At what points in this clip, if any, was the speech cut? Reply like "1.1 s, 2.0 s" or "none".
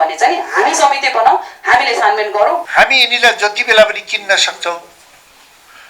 2.7 s